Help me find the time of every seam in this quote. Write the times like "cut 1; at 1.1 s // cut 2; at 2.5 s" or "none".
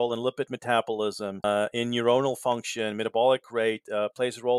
none